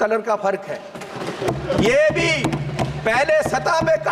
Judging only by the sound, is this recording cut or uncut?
uncut